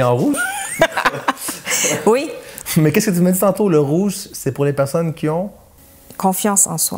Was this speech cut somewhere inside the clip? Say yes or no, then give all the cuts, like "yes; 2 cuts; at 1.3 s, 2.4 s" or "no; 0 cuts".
no; 0 cuts